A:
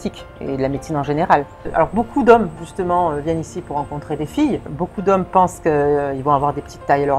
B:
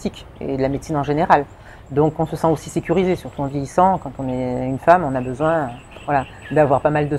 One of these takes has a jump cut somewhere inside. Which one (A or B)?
A